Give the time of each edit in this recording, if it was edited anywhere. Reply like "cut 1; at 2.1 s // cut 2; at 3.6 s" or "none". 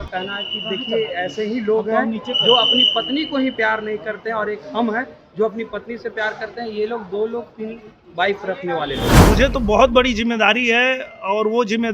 cut 1; at 9.2 s